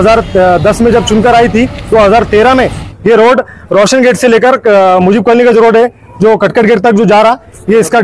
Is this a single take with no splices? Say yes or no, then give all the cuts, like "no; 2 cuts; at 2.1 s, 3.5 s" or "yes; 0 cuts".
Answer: yes; 0 cuts